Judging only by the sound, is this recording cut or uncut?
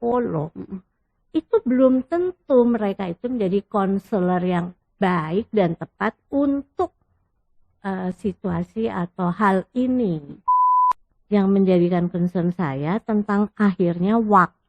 cut